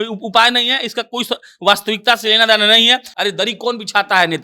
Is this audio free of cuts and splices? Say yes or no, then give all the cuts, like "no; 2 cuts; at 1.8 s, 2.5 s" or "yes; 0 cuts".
no; 1 cut; at 3.1 s